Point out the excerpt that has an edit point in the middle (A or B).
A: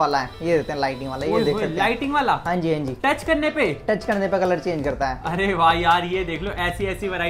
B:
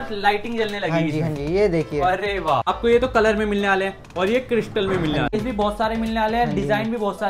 B